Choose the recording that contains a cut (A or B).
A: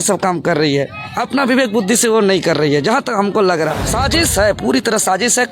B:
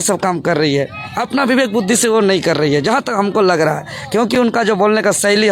A